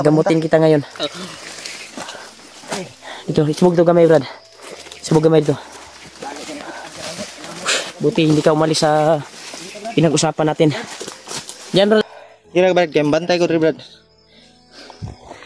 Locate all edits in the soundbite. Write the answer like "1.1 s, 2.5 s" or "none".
12.0 s

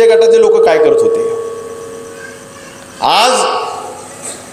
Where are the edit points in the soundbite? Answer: none

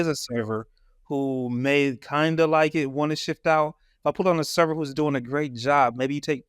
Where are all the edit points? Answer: none

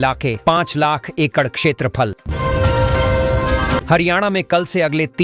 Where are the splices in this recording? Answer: 2.2 s, 3.8 s

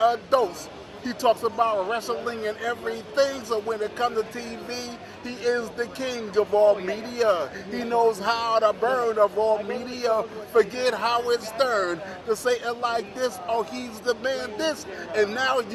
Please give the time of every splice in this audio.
none

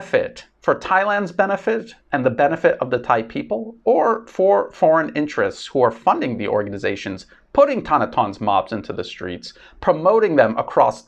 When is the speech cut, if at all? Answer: none

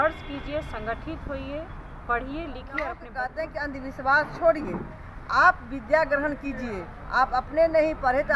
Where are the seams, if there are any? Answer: 3.1 s

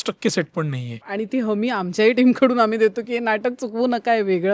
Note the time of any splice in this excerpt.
0.9 s

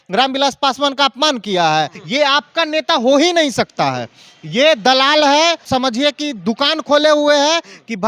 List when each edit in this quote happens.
2.0 s, 5.7 s

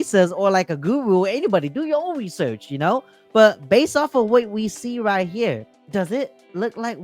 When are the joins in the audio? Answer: 5.7 s

